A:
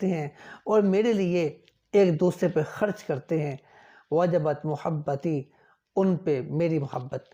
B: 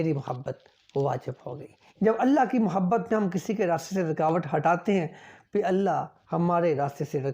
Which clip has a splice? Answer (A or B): B